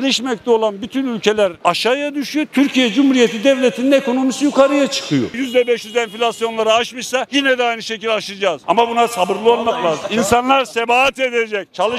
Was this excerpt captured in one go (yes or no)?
no